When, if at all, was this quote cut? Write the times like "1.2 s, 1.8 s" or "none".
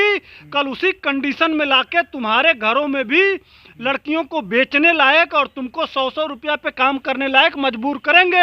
none